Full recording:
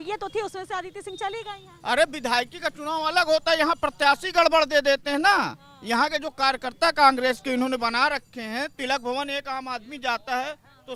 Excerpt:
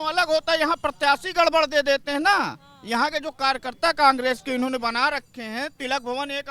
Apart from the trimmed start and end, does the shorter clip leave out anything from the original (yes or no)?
no